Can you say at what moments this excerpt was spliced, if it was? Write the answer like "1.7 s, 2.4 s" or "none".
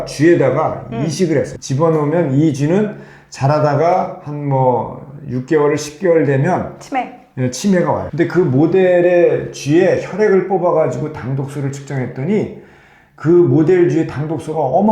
1.6 s, 8.1 s